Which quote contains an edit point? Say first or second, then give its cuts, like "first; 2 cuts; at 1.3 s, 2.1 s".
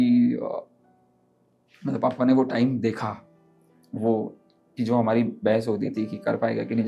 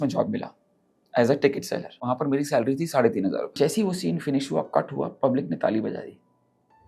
second; 2 cuts; at 2.1 s, 3.5 s